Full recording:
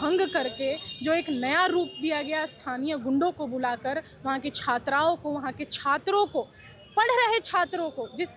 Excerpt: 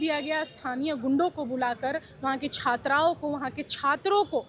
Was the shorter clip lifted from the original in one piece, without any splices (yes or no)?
yes